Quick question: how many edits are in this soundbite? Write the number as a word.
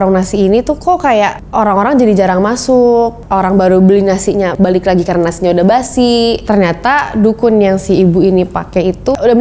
two